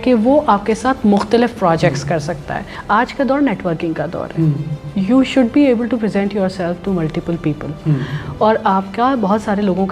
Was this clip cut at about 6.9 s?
no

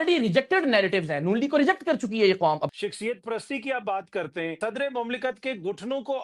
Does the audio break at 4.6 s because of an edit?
yes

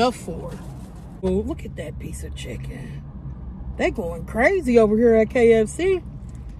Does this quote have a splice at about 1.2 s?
yes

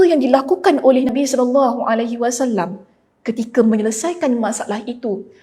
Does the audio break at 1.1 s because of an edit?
yes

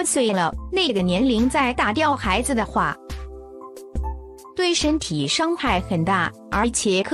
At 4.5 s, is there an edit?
yes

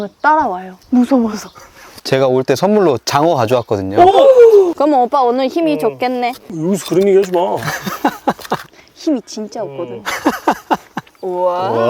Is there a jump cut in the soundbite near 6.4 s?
no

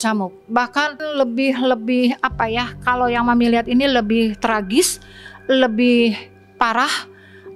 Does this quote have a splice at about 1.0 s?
yes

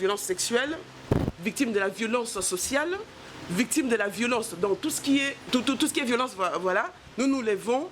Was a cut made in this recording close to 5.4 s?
yes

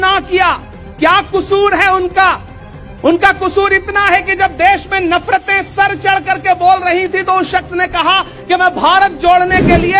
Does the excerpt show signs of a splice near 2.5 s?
no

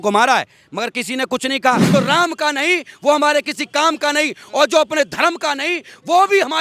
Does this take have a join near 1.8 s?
yes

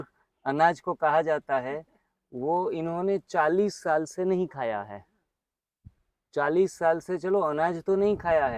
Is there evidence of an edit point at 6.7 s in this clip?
no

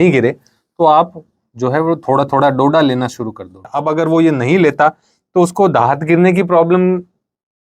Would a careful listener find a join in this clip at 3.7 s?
yes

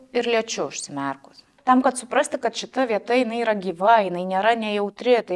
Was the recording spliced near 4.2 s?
no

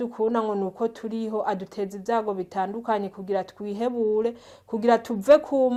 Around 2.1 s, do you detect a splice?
no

